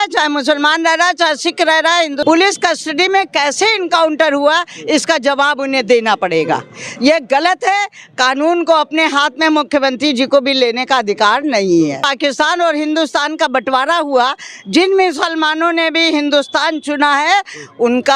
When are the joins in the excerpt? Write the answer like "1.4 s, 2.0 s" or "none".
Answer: 2.2 s, 12.1 s